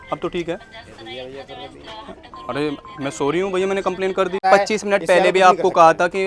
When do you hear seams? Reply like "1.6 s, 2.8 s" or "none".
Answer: 4.4 s